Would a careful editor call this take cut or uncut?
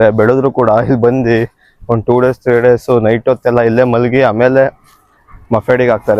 uncut